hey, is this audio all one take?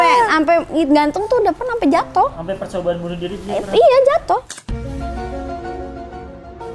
yes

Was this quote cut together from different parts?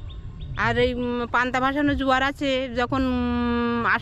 no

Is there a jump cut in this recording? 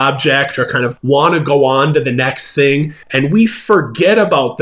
yes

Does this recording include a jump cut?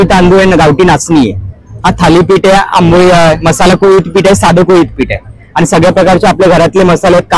no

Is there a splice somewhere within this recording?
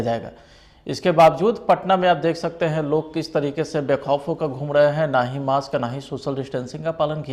no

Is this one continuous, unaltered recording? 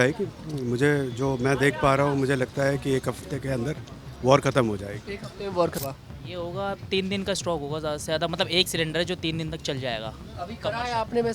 no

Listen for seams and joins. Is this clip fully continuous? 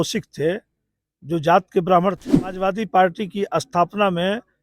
no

